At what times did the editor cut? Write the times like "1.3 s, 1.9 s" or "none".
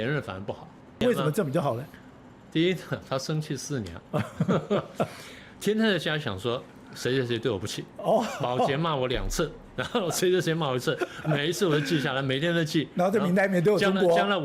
1.0 s